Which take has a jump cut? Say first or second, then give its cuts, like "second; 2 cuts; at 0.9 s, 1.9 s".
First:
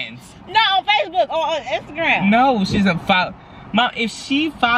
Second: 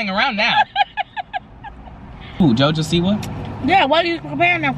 second; 1 cut; at 2.4 s